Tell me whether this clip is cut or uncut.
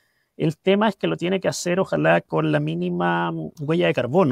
uncut